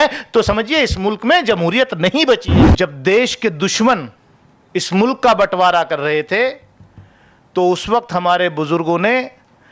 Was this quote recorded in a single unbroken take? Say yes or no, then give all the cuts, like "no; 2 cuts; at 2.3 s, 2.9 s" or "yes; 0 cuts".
no; 1 cut; at 2.6 s